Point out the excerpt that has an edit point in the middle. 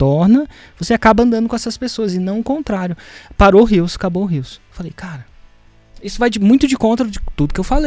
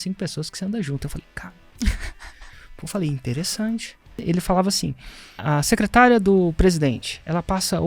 second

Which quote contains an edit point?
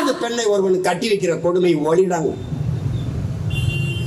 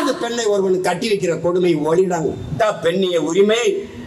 second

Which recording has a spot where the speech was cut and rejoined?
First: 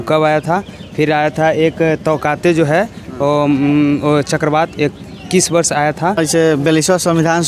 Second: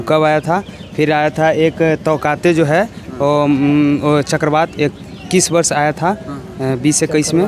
first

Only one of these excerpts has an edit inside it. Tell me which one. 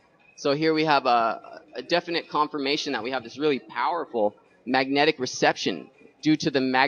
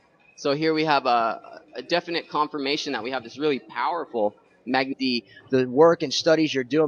first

